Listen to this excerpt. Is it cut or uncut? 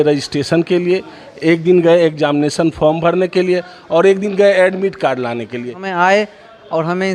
cut